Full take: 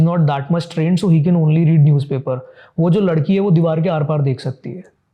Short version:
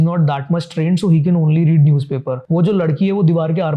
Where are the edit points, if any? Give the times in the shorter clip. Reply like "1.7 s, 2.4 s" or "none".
2.3 s